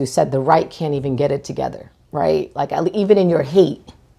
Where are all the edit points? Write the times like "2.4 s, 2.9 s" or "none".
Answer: none